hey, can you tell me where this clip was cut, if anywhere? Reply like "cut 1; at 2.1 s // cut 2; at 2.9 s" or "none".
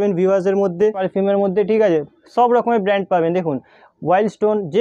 cut 1; at 1.0 s